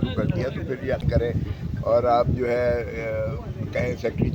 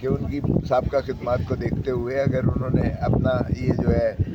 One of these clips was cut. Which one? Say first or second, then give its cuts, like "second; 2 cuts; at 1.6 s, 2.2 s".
first; 1 cut; at 1.0 s